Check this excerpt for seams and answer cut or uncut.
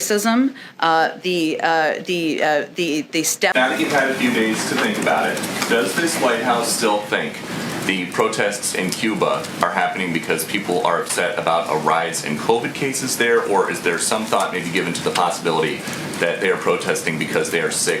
cut